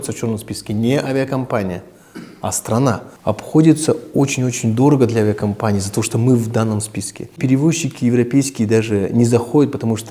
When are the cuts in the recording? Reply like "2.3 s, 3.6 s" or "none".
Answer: 3.1 s, 7.4 s